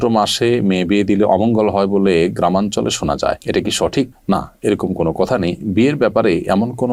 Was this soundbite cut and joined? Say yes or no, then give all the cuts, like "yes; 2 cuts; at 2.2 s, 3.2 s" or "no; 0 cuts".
no; 0 cuts